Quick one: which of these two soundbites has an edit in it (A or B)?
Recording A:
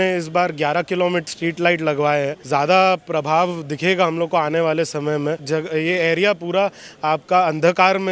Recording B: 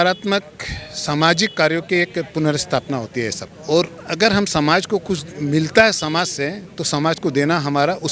A